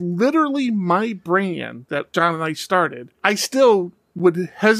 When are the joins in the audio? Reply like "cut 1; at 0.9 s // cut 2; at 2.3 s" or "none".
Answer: cut 1; at 2.0 s